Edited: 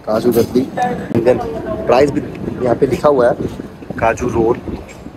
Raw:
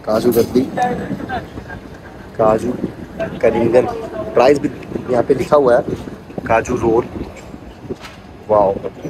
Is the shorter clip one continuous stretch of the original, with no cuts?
no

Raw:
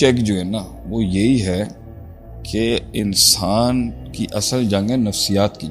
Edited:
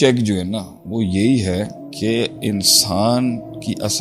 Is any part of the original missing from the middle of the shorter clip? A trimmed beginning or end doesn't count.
yes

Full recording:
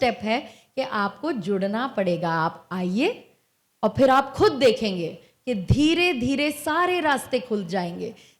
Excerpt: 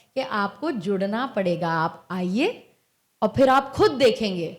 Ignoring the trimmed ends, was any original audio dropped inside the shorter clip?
no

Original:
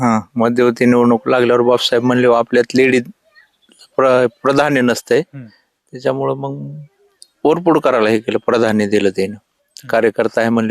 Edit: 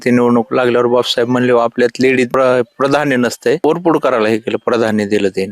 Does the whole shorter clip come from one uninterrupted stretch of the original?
no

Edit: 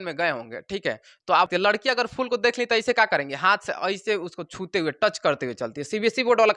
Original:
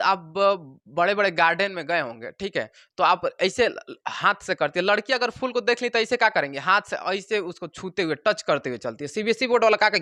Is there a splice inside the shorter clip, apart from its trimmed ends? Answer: yes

